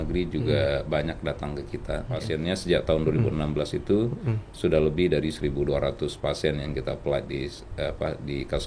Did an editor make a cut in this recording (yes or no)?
yes